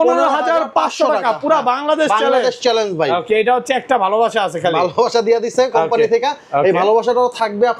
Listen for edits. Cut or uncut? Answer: uncut